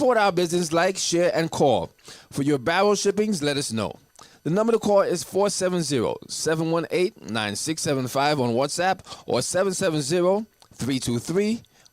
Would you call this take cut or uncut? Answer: uncut